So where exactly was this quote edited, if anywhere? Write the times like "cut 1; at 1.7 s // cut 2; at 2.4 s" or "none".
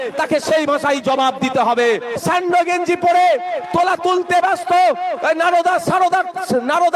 cut 1; at 2.1 s